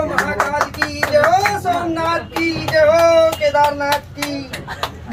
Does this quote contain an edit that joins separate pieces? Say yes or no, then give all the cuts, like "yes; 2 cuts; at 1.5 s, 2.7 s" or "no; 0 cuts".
no; 0 cuts